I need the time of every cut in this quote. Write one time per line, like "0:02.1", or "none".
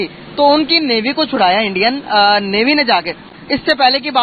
0:03.2